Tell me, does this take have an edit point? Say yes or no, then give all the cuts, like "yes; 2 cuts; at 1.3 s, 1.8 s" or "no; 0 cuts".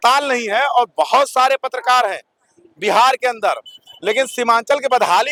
no; 0 cuts